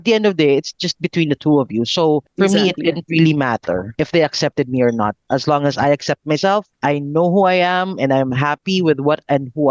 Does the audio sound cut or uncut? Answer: cut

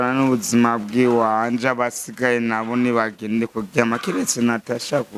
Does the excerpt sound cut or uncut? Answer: uncut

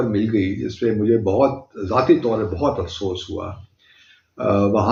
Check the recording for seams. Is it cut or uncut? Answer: uncut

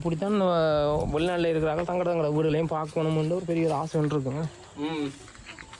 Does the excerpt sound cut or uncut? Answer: uncut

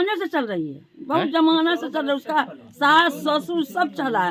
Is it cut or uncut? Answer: uncut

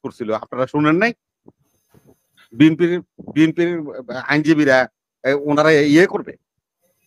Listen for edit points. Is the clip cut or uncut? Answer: uncut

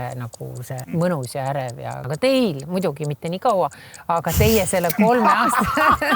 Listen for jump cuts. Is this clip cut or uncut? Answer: cut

